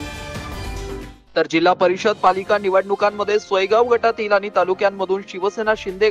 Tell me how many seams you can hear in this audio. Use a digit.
1